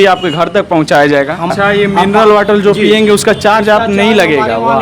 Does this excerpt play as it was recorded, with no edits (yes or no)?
no